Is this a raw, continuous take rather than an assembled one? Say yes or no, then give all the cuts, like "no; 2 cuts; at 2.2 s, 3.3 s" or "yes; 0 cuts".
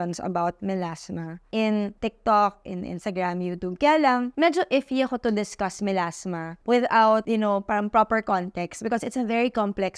no; 2 cuts; at 1.3 s, 1.9 s